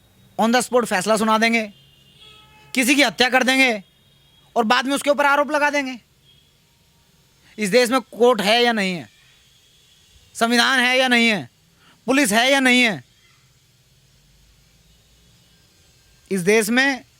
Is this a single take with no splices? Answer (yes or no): yes